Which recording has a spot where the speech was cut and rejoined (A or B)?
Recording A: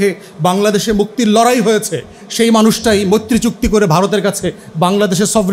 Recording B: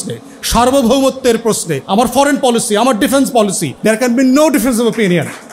B